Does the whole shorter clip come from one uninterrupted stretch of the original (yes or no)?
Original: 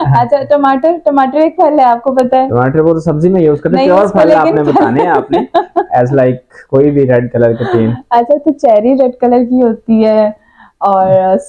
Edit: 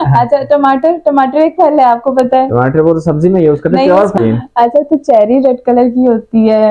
no